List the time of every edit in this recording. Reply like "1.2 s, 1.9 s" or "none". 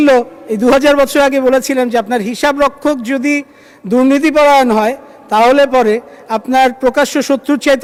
none